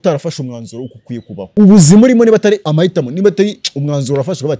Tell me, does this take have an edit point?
yes; 2 cuts; at 1.5 s, 2.7 s

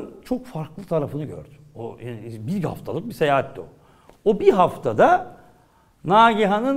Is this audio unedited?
yes; 0 cuts

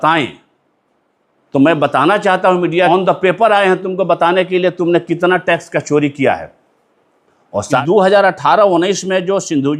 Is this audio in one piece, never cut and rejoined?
no; 2 cuts; at 2.9 s, 7.8 s

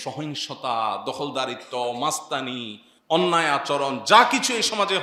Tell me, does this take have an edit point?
no; 0 cuts

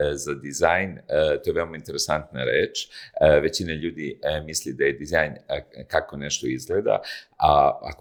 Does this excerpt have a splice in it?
no; 0 cuts

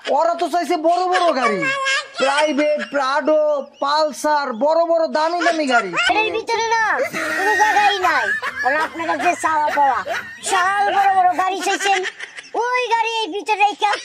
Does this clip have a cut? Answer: yes; 1 cut; at 6.1 s

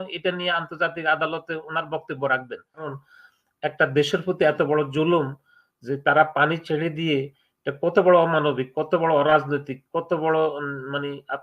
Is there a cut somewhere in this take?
yes; 1 cut; at 2.9 s

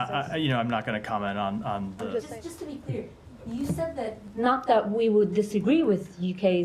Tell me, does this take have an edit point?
yes; 1 cut; at 2.3 s

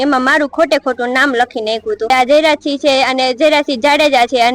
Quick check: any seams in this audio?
yes; 1 cut; at 2.1 s

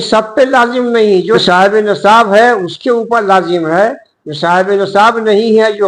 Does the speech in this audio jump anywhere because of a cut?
yes; 1 cut; at 1.4 s

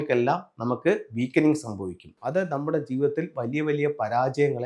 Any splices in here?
yes; 1 cut; at 2.1 s

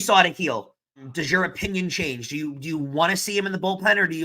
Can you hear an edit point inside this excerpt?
yes; 1 cut; at 1.1 s

